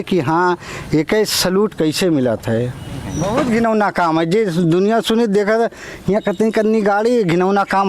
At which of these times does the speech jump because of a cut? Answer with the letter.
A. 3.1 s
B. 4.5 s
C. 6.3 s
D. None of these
A